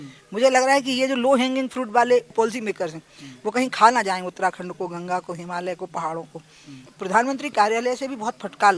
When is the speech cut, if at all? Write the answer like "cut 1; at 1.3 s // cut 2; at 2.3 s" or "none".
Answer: cut 1; at 2.3 s // cut 2; at 6.9 s